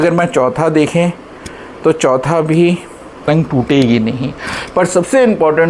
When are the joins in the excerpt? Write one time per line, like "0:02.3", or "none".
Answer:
0:03.2